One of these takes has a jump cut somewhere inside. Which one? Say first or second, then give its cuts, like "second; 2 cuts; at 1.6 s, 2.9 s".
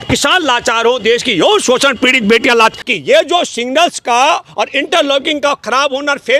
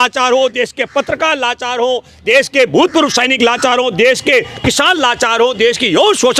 first; 1 cut; at 2.8 s